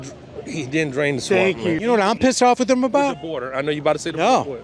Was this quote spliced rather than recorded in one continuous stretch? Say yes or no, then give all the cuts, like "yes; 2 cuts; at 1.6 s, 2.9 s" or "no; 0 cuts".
yes; 1 cut; at 1.8 s